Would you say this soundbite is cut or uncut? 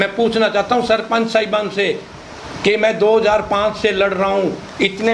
uncut